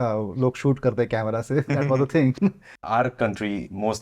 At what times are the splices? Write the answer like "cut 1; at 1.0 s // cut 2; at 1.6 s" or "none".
cut 1; at 2.8 s